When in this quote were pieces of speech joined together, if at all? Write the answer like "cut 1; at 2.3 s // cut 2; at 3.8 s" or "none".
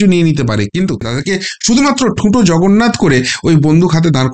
cut 1; at 1.1 s